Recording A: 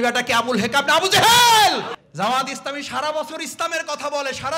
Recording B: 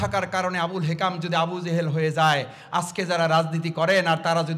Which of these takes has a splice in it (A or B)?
A